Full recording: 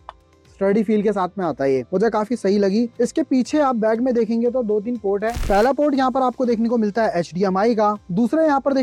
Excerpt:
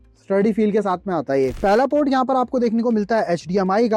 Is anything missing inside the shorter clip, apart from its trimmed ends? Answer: yes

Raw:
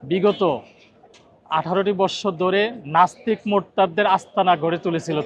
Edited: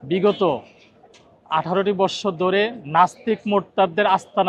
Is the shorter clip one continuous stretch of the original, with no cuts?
yes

